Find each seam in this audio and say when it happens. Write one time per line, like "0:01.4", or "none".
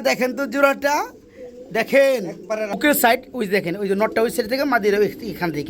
0:02.7